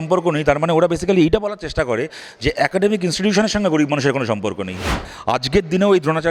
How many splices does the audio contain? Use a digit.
1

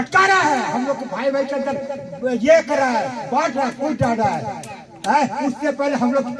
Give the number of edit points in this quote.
0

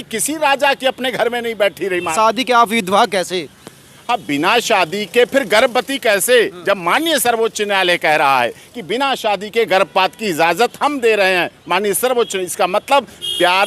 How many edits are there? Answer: 1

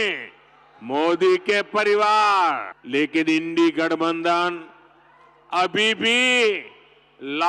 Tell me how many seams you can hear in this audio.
1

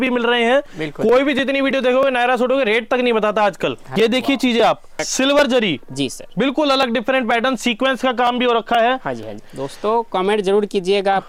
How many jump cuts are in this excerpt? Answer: 3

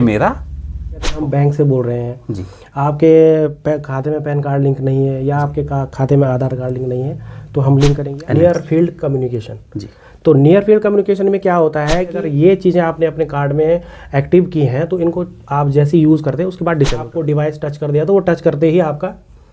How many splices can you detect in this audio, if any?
4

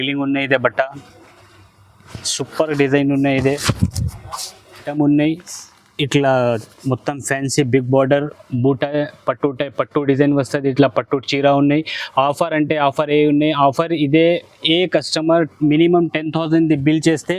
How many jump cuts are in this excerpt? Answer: 1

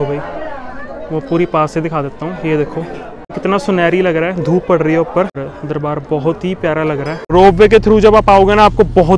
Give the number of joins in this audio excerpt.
3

